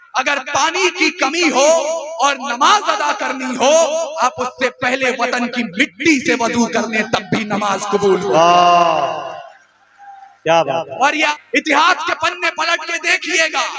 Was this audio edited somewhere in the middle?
yes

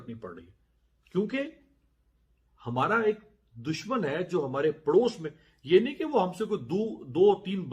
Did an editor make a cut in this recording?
no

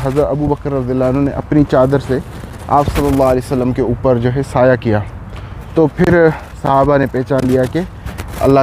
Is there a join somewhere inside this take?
no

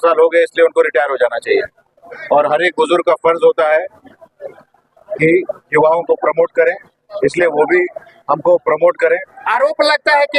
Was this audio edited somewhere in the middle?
yes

